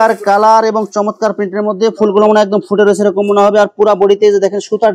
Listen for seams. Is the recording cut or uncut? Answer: uncut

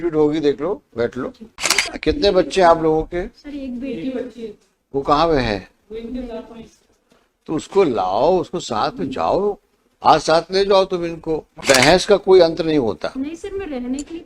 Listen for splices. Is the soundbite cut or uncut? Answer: cut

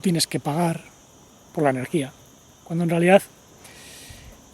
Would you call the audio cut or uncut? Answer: uncut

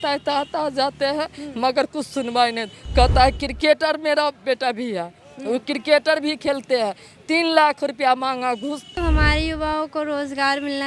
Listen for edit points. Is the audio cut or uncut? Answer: cut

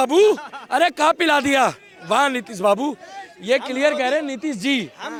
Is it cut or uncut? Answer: uncut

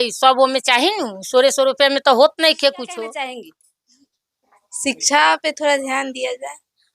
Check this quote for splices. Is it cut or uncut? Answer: cut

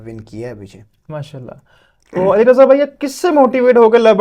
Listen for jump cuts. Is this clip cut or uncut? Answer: uncut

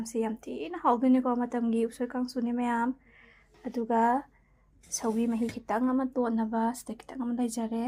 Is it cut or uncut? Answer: uncut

